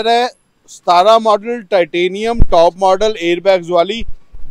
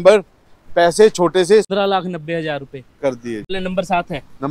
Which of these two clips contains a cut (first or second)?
second